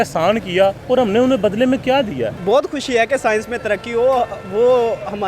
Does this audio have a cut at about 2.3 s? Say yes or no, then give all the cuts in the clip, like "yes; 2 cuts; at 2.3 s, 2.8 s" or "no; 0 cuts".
yes; 2 cuts; at 0.8 s, 2.3 s